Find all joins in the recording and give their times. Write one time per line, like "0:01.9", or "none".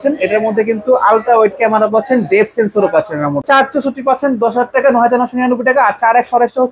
0:03.4